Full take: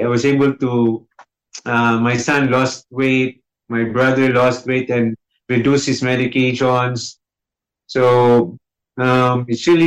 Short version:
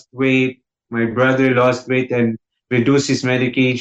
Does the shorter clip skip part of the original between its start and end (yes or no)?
no